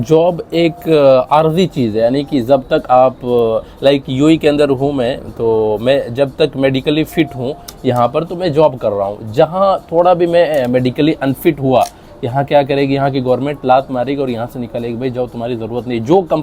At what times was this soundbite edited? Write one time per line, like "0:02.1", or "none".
none